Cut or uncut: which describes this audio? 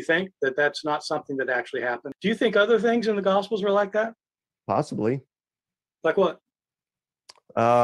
cut